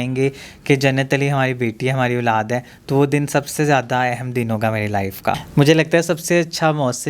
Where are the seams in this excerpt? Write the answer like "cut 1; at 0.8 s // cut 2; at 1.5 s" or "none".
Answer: cut 1; at 5.4 s